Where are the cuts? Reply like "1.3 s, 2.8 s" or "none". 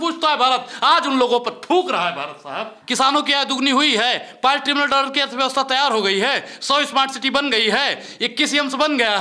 2.8 s

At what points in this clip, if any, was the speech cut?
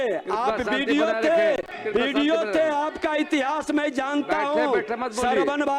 1.7 s

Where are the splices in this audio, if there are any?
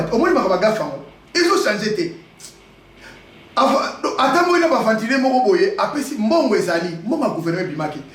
2.3 s

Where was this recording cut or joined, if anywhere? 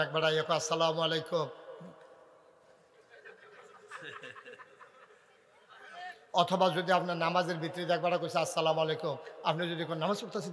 none

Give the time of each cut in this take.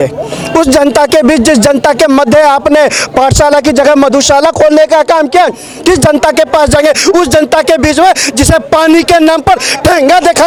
none

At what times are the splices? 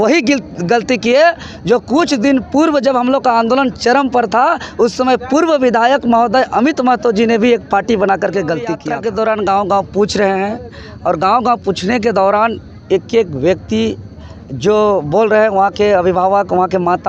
8.9 s

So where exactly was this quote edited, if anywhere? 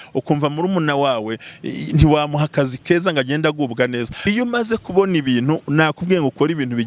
4.3 s

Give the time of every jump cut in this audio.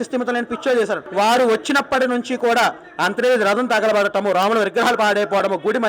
1.0 s

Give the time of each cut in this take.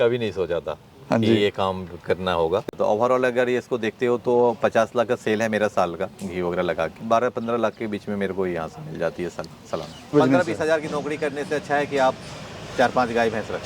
2.7 s, 7.0 s, 10.1 s

